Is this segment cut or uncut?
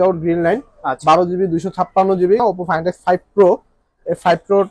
cut